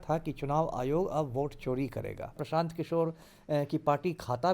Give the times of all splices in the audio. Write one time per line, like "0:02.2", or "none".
0:02.4